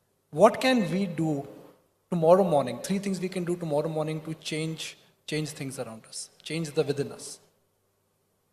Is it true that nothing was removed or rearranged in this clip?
yes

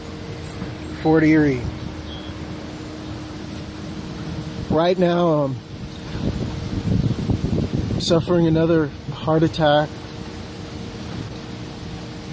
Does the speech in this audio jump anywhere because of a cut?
no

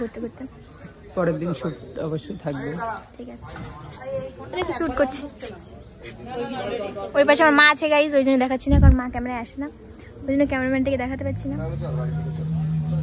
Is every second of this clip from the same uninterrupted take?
yes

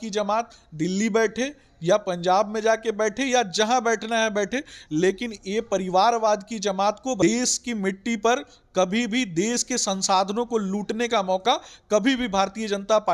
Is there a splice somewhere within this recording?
yes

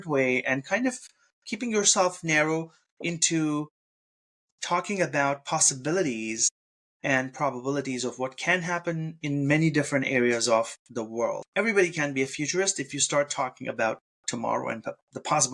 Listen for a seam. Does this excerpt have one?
yes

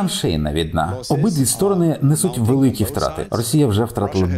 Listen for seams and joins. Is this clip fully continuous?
yes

